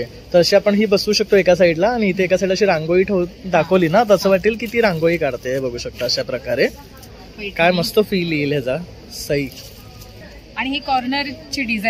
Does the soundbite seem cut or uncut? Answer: cut